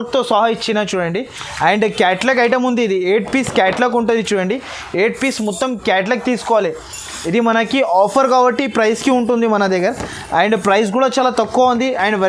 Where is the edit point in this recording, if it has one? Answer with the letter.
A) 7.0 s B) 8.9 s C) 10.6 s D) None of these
D